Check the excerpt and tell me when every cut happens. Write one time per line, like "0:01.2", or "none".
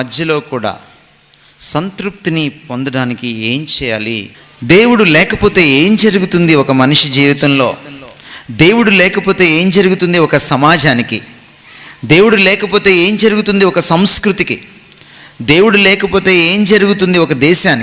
0:04.4